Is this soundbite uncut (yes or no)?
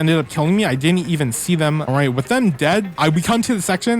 no